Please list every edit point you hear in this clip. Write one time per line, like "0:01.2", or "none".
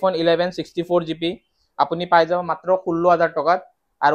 none